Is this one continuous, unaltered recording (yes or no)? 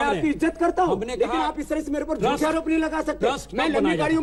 yes